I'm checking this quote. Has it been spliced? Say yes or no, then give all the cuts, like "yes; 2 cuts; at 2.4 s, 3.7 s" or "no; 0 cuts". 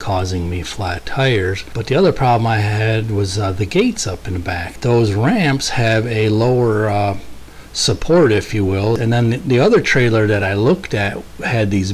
yes; 3 cuts; at 1.7 s, 4.8 s, 9.0 s